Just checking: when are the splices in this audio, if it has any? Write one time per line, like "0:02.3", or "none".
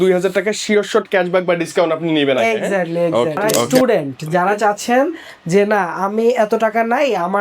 0:03.7